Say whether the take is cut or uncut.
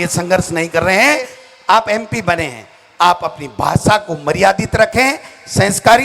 cut